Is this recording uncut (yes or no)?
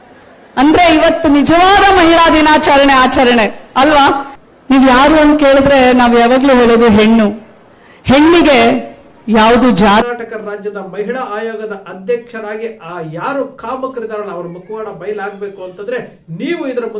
no